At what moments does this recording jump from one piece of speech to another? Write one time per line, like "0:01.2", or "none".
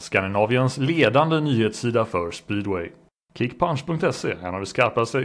0:03.3